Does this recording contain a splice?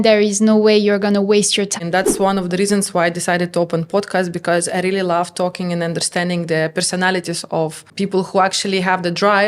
yes; 1 cut; at 1.7 s

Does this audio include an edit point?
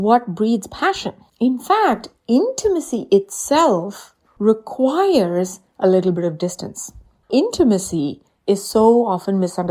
yes; 1 cut; at 7.3 s

